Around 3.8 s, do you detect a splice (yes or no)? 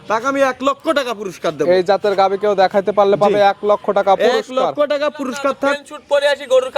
no